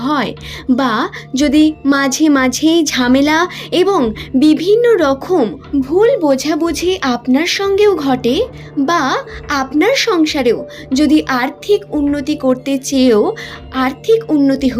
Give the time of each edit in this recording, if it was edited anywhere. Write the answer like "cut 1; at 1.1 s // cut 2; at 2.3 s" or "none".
cut 1; at 5.6 s